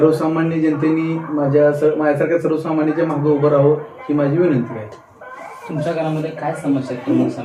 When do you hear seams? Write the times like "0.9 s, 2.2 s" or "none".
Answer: none